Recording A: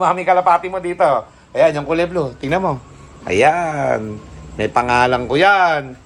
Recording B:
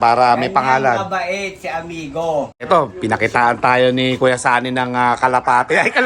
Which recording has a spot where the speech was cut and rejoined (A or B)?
B